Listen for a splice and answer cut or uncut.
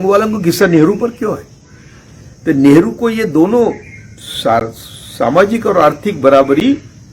uncut